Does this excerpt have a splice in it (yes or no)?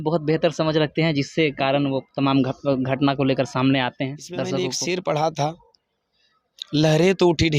yes